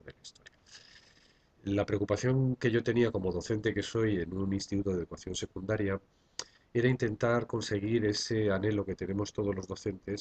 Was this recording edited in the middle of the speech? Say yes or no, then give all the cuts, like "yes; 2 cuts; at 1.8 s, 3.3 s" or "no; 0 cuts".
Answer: yes; 1 cut; at 5.6 s